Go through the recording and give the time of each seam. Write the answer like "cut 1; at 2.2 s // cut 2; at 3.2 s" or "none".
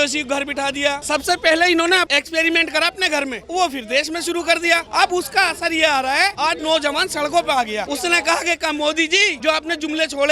cut 1; at 1.0 s // cut 2; at 2.1 s // cut 3; at 3.4 s // cut 4; at 4.9 s // cut 5; at 6.3 s // cut 6; at 7.9 s // cut 7; at 9.3 s